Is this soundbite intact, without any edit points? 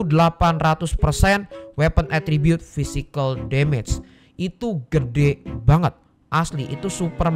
yes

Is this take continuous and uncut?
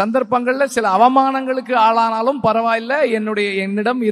yes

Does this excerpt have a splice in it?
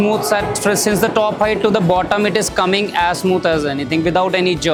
no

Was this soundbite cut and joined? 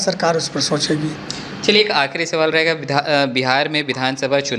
no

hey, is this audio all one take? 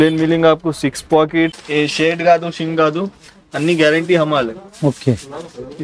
no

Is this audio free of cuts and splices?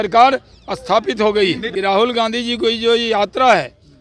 no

